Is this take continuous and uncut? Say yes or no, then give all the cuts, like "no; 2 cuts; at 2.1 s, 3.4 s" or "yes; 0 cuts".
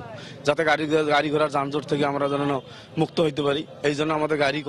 yes; 0 cuts